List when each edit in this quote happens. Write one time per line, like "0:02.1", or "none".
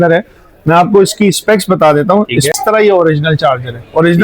0:02.5

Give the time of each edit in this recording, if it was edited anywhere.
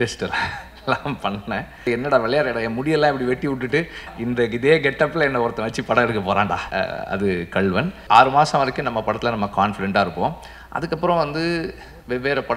0:01.9
0:04.1
0:06.7
0:08.0

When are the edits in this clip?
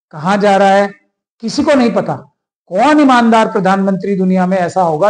none

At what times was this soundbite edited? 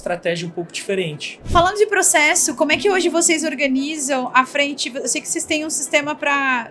0:01.3

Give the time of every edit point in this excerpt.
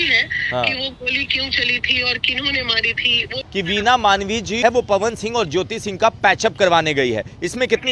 0:03.4
0:04.6

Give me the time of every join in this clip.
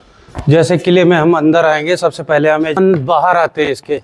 0:02.8

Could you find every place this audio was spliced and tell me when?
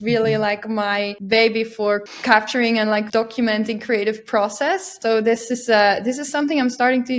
0:01.2
0:02.1
0:03.1
0:04.9

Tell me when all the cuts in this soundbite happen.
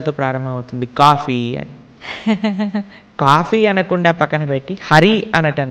0:03.2

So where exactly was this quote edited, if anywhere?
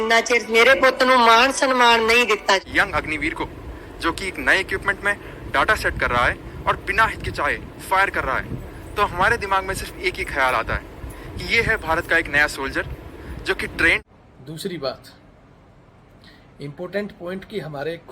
0:02.3
0:14.0

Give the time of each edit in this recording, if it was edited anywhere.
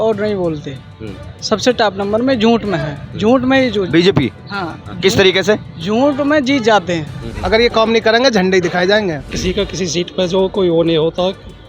0:07.2
0:09.3

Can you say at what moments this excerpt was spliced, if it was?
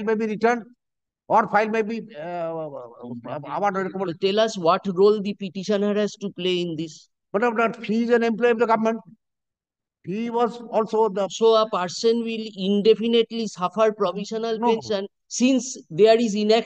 none

